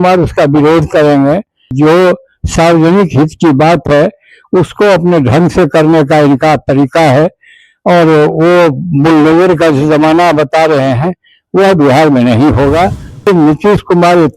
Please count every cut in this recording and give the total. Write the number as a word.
two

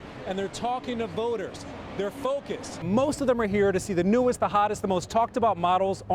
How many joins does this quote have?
one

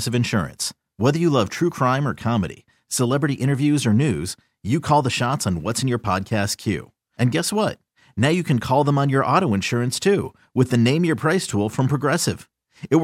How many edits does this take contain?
zero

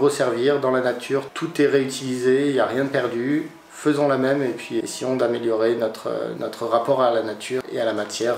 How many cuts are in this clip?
four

